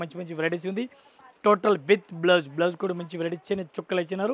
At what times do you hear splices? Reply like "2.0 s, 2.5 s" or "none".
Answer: none

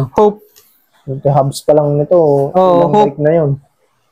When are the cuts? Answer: none

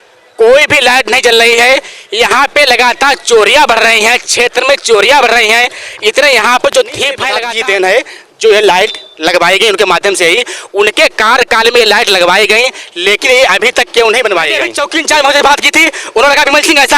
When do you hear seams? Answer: 7.3 s, 14.7 s

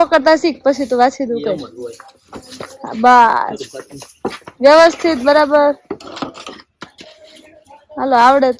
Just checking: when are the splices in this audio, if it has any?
none

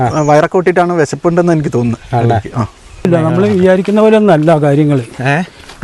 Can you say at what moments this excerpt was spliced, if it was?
3.1 s

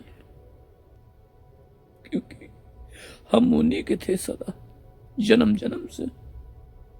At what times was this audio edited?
1.0 s

